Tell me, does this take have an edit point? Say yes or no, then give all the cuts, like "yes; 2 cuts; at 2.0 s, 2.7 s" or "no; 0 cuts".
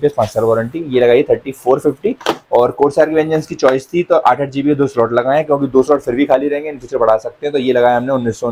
no; 0 cuts